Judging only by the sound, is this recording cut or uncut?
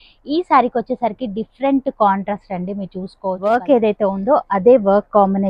cut